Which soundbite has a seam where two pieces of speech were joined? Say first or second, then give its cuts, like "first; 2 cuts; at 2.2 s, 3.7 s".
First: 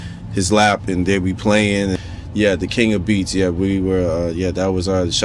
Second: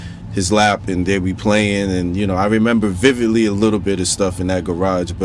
first; 1 cut; at 2.0 s